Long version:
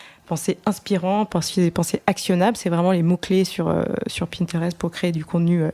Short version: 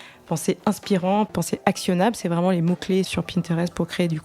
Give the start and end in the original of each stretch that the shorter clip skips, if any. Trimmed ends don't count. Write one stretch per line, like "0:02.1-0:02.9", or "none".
0:01.3-0:01.7
0:03.5-0:04.1